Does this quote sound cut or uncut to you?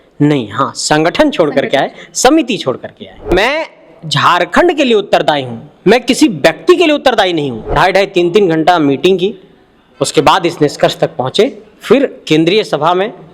cut